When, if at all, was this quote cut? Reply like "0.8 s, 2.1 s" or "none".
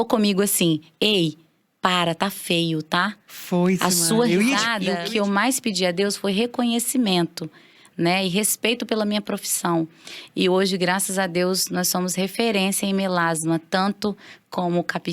4.8 s